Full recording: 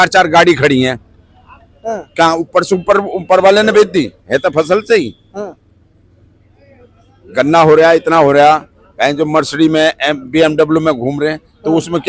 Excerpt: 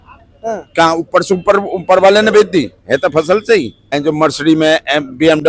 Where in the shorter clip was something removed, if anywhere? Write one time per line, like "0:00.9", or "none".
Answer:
0:03.9